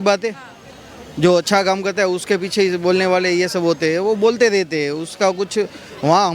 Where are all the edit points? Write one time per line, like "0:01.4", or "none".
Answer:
none